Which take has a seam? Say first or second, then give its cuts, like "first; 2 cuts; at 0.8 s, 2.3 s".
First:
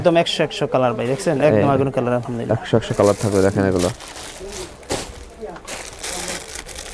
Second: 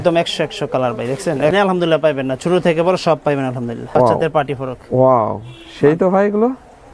second; 2 cuts; at 1.5 s, 3.8 s